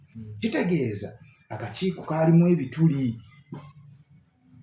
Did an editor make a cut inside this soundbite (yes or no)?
no